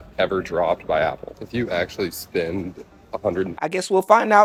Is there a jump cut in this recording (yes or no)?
no